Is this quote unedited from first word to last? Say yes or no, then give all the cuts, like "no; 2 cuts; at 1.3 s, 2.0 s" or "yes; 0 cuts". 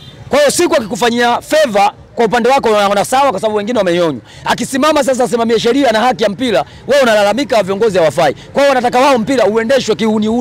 yes; 0 cuts